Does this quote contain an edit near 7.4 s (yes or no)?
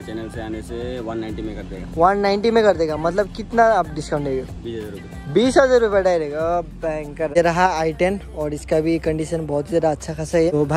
yes